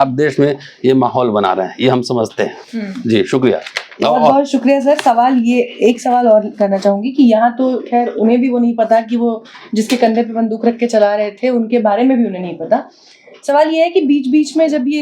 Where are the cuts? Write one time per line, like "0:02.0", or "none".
none